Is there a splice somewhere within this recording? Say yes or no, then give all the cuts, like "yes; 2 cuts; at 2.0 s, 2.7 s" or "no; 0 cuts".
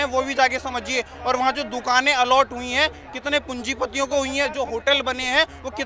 no; 0 cuts